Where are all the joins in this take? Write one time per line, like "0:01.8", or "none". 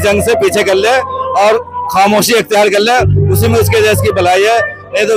none